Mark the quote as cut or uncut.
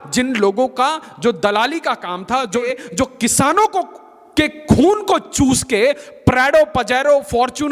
cut